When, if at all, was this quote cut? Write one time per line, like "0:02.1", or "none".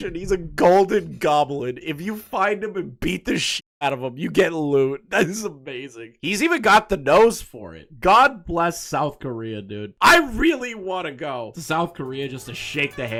none